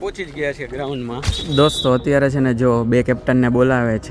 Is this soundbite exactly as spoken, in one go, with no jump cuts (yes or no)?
no